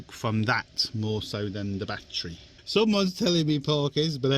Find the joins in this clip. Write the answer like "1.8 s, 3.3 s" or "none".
2.6 s